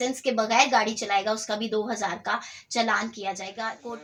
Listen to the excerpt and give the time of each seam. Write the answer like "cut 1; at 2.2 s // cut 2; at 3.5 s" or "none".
none